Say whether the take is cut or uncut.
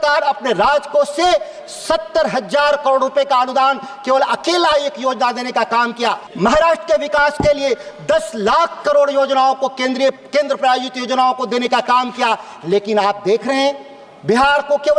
cut